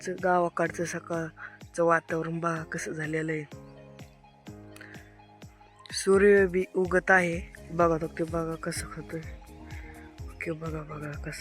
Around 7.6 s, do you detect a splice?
yes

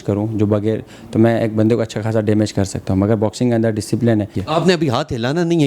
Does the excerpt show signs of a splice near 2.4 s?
no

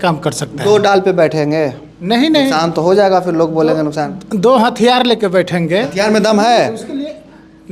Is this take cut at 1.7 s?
no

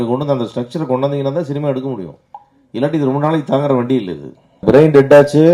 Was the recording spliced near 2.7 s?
no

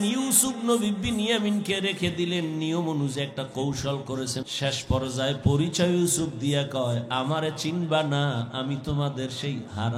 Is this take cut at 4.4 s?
yes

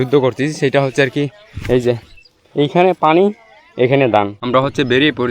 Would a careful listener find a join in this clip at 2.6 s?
no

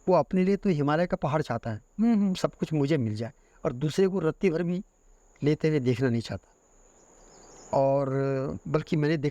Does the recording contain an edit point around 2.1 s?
no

